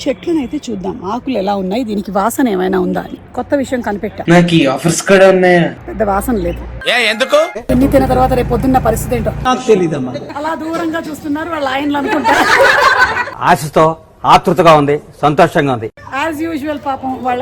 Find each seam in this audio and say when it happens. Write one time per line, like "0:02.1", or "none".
0:03.2
0:04.2
0:05.8
0:07.7
0:09.4
0:10.3
0:13.3